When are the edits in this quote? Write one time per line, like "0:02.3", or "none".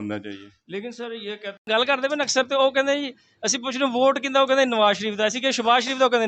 0:01.7